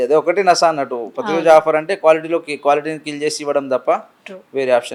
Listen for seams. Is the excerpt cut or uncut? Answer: uncut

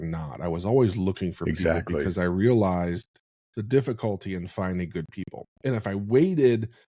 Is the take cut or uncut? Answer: uncut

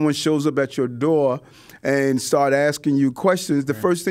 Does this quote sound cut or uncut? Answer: uncut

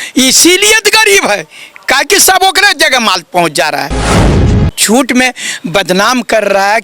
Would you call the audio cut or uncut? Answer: cut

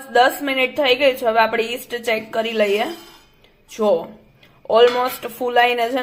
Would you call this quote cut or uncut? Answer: uncut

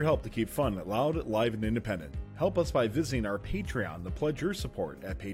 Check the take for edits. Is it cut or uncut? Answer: uncut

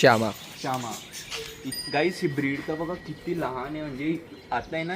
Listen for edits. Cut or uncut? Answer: cut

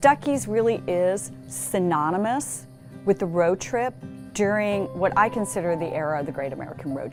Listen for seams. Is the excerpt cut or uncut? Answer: uncut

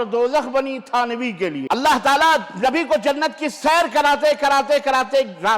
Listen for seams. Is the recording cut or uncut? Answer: cut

